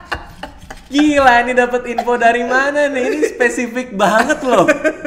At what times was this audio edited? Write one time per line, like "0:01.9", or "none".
none